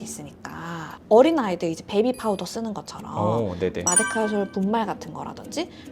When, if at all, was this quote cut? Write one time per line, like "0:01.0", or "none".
0:00.9